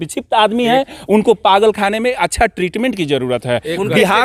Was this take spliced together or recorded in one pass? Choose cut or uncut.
uncut